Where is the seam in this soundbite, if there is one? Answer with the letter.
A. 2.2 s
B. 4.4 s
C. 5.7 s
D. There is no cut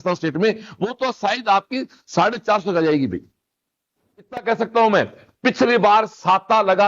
B